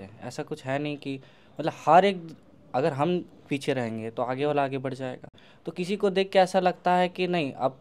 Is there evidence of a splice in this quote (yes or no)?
no